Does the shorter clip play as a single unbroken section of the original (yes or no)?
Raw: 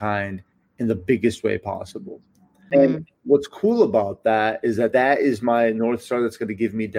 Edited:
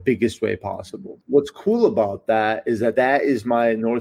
no